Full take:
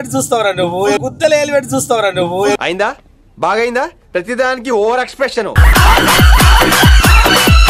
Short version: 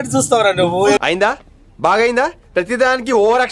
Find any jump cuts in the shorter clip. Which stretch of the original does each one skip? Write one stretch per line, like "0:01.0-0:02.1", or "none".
0:01.0-0:02.6